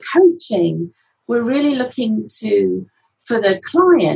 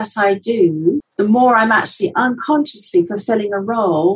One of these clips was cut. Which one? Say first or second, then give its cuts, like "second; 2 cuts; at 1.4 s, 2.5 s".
second; 1 cut; at 1.1 s